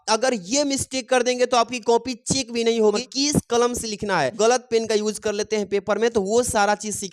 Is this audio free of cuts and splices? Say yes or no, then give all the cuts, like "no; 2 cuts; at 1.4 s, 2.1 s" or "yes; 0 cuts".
no; 2 cuts; at 3.1 s, 4.3 s